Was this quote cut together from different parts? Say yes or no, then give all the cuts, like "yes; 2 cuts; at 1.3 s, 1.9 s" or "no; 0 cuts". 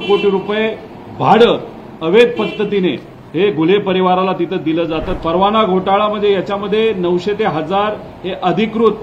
yes; 1 cut; at 5.1 s